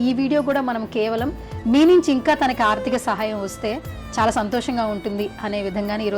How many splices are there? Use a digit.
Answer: 0